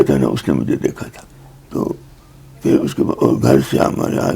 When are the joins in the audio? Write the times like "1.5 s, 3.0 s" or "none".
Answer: 1.1 s